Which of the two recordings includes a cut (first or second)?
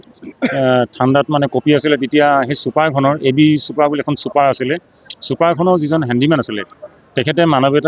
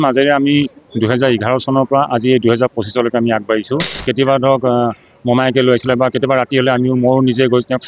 second